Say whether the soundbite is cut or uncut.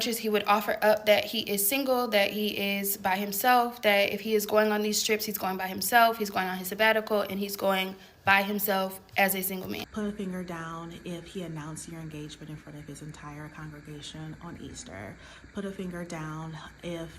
cut